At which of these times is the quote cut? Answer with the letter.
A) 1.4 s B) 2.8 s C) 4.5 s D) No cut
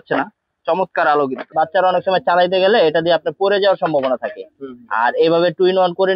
A